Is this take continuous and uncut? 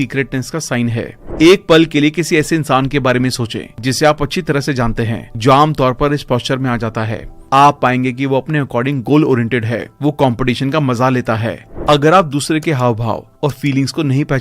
no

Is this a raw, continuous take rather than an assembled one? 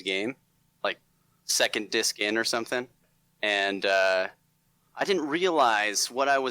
no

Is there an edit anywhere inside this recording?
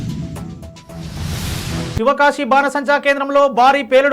yes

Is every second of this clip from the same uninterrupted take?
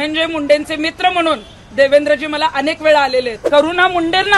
no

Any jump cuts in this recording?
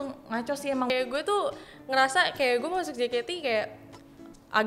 yes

